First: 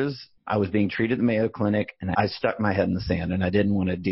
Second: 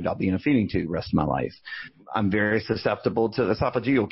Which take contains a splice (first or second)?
first